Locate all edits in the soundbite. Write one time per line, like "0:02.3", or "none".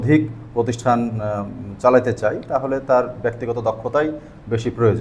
none